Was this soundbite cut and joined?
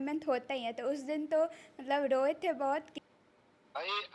yes; 1 cut; at 2.9 s

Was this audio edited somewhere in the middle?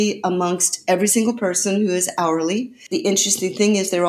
yes; 1 cut; at 2.8 s

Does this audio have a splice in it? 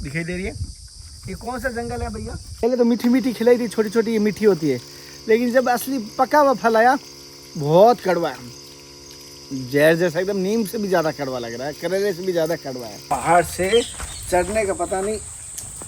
yes; 2 cuts; at 2.6 s, 13.0 s

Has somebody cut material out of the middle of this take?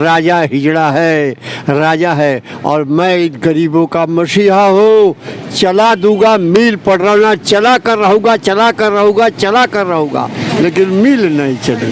no; 0 cuts

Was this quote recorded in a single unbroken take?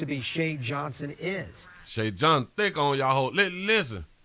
yes; 0 cuts

